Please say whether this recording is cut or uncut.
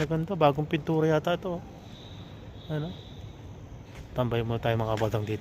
uncut